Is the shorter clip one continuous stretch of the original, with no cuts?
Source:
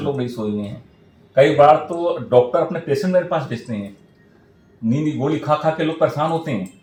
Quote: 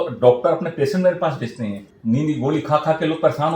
no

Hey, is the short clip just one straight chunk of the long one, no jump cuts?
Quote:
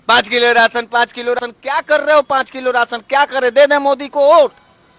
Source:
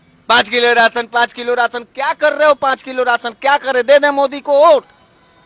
no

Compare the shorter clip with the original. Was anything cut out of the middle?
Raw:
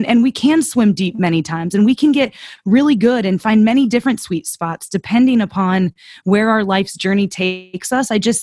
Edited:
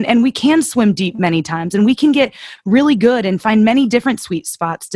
no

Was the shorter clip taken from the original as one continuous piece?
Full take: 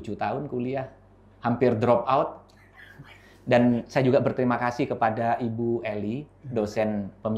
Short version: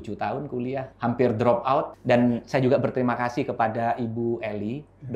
no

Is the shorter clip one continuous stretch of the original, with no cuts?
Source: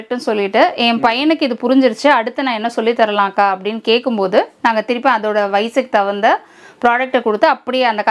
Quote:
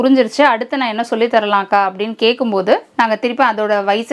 yes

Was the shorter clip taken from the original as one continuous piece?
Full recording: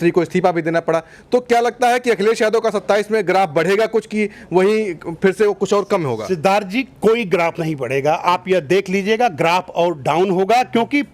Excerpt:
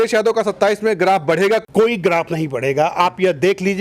no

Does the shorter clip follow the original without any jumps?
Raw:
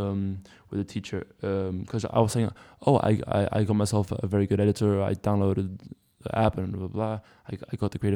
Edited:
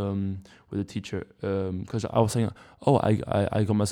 yes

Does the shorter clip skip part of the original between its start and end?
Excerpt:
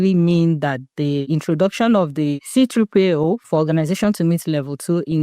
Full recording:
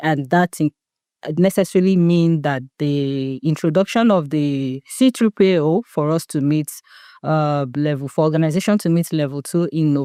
yes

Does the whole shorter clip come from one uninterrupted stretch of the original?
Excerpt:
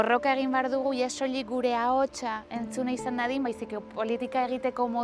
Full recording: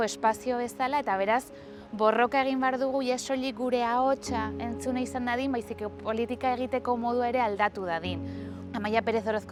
yes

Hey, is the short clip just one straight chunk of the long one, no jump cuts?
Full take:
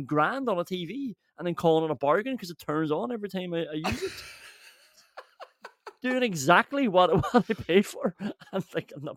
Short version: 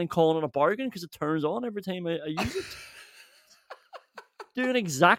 yes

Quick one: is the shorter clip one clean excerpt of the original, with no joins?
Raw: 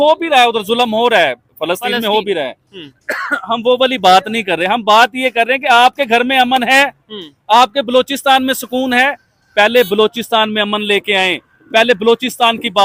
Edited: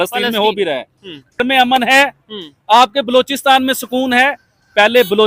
no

